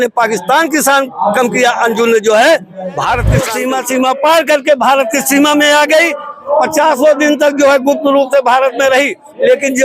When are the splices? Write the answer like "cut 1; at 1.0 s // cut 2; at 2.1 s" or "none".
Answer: cut 1; at 3.5 s